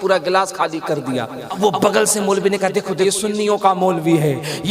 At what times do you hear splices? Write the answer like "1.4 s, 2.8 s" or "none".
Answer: 1.6 s, 3.0 s

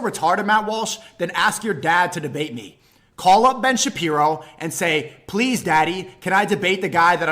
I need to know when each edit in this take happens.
none

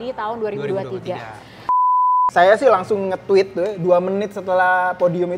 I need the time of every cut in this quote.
1.8 s

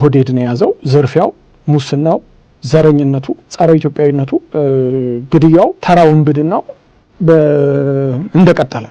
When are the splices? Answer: 0.8 s, 3.4 s, 4.5 s, 5.8 s

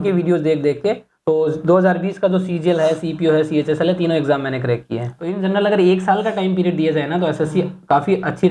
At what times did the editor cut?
1.1 s, 5.4 s

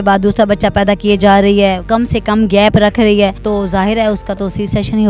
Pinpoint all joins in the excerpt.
1.8 s, 3.4 s

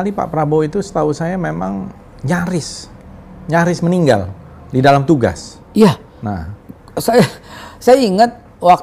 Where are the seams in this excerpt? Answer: none

